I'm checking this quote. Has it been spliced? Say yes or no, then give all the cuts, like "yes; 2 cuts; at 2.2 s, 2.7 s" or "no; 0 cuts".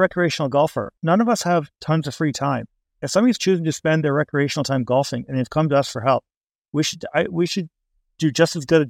yes; 1 cut; at 0.9 s